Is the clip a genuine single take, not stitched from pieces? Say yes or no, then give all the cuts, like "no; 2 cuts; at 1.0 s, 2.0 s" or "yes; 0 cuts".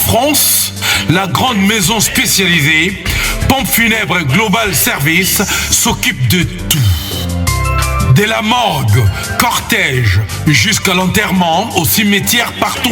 yes; 0 cuts